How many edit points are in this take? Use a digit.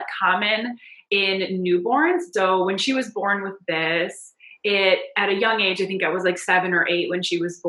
1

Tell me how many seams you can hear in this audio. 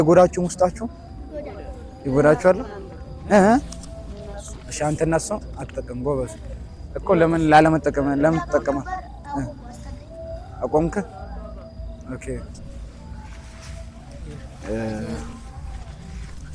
0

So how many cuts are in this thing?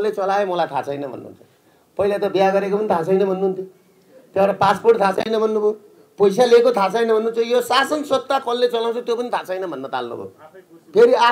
0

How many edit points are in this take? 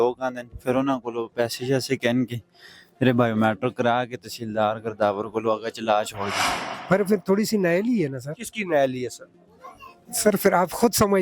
1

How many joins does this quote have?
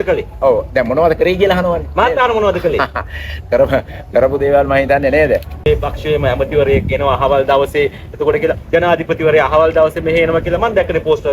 1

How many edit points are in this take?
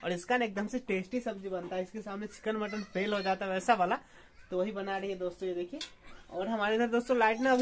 0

